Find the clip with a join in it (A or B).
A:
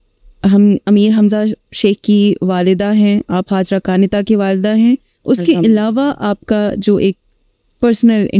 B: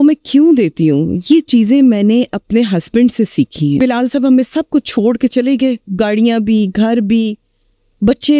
B